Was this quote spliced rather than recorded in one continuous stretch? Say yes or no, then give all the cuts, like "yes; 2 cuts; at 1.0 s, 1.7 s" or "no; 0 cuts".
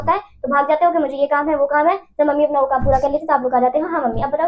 no; 0 cuts